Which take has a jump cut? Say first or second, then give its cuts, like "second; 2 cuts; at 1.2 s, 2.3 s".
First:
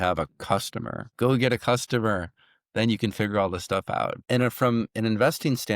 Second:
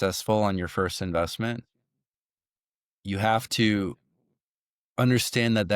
first; 2 cuts; at 1.1 s, 4.2 s